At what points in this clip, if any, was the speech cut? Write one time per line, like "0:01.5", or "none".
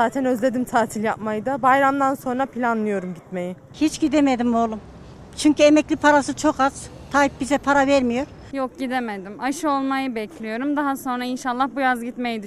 0:03.7
0:08.4